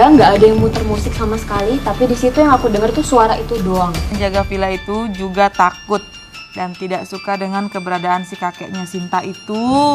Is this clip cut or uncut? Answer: cut